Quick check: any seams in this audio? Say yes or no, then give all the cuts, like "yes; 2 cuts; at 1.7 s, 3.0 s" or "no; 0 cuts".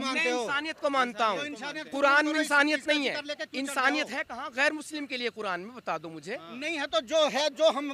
no; 0 cuts